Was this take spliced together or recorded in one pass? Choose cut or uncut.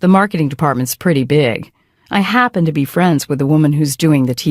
cut